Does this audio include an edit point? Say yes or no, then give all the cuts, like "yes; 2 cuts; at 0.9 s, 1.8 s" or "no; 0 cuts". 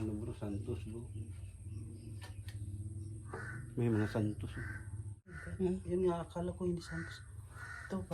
yes; 1 cut; at 5.4 s